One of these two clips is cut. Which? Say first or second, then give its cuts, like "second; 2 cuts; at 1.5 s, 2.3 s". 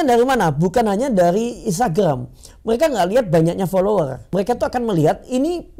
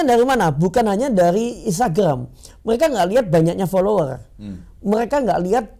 first; 1 cut; at 4.3 s